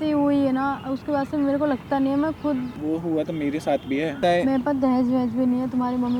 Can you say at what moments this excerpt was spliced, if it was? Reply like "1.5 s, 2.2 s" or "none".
2.7 s, 4.2 s